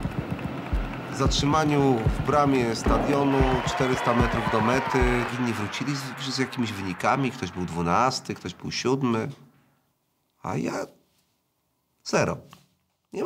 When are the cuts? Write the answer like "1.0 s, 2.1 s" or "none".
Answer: 5.3 s